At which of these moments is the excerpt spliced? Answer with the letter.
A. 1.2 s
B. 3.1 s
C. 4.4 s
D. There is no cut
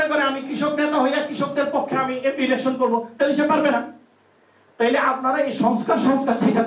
D